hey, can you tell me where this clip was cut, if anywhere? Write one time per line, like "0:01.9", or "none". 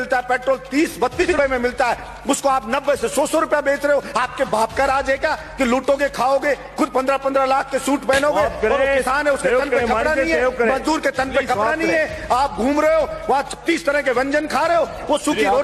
0:01.2